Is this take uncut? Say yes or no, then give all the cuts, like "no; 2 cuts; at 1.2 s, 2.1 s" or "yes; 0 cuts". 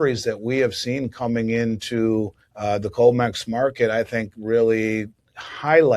no; 1 cut; at 2.4 s